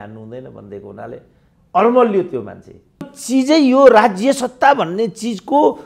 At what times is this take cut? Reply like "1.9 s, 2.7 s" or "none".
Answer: 3.2 s

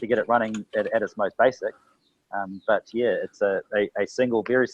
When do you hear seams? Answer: none

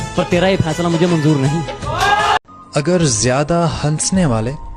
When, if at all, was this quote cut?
2.6 s

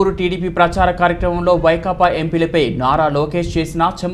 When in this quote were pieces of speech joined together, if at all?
none

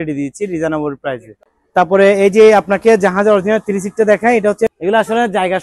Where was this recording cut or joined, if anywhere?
4.7 s

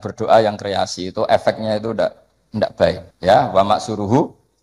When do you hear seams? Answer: 3.1 s

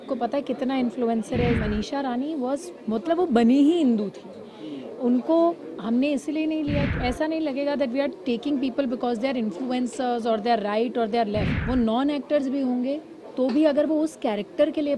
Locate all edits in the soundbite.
1.6 s, 6.9 s, 11.5 s

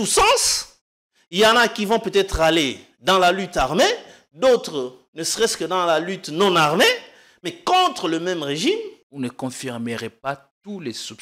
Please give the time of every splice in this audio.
9.0 s

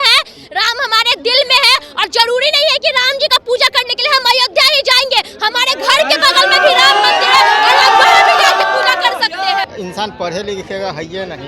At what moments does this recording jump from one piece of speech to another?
9.7 s

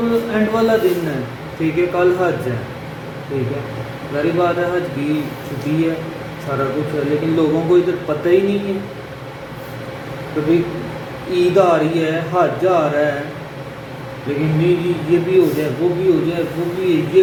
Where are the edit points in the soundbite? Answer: none

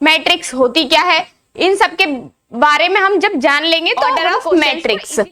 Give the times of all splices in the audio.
4.2 s

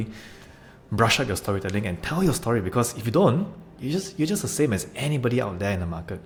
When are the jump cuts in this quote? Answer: none

